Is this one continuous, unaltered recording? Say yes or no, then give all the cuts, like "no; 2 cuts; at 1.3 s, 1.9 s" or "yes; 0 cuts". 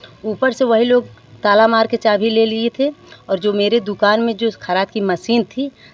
yes; 0 cuts